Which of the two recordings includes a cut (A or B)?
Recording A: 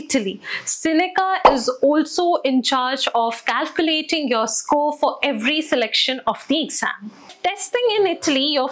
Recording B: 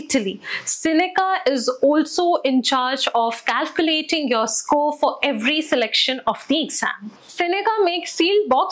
A